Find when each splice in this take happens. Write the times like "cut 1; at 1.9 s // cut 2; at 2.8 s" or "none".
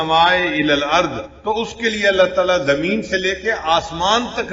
cut 1; at 1.3 s